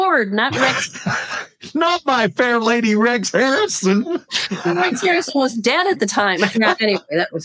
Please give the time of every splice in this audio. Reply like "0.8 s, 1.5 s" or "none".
6.5 s